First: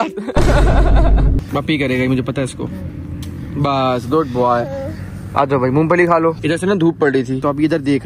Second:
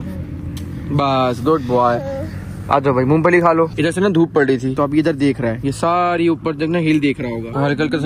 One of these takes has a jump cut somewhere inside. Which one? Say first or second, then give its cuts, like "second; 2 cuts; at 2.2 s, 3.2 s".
first; 1 cut; at 1.4 s